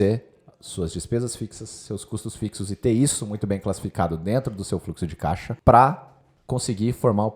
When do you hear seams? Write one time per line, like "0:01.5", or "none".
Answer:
0:05.5

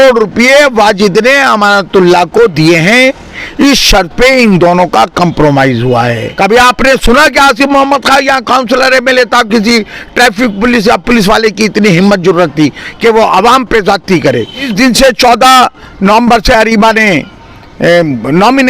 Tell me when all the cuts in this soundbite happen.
0:06.2
0:14.7

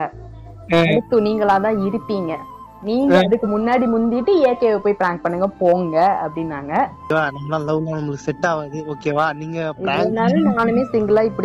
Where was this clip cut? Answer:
0:07.1

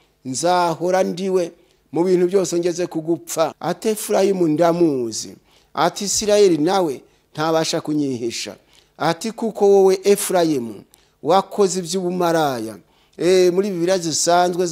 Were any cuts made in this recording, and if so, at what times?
0:03.6

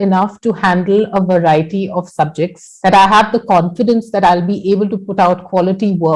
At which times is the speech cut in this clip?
0:02.6

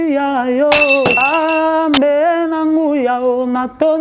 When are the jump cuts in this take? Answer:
0:01.2

